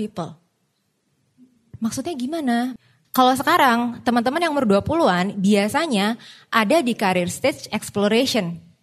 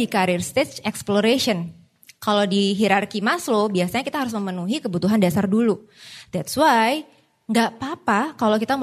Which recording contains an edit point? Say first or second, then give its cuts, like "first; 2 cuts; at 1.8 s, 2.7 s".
first; 1 cut; at 2.7 s